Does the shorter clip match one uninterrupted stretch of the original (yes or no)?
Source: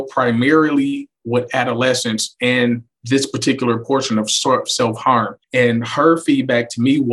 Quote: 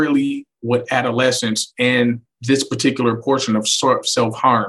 yes